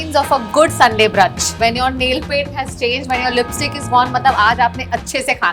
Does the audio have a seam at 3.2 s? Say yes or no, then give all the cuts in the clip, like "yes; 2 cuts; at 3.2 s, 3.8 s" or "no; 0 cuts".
no; 0 cuts